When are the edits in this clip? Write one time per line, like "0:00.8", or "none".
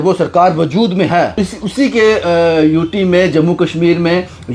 0:01.4